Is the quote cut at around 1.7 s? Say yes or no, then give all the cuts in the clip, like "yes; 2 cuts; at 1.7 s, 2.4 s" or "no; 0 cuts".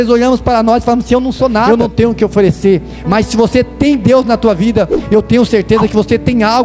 yes; 1 cut; at 1.7 s